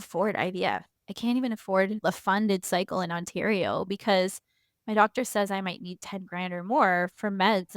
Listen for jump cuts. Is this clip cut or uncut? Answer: cut